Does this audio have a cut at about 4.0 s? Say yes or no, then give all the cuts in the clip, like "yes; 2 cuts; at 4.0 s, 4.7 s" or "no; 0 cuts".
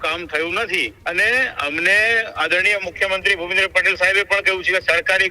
no; 1 cut; at 0.9 s